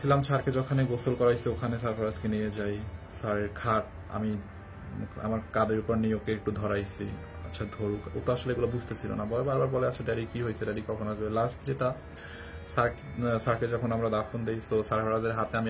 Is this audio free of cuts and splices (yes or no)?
yes